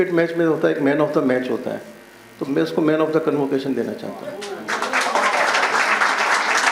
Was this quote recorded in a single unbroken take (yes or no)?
yes